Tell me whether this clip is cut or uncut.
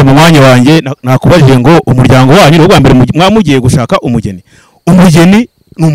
uncut